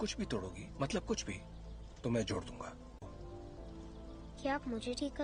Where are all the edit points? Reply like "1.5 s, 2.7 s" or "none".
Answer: none